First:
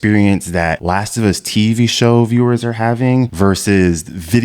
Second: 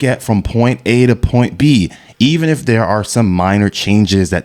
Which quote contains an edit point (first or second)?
first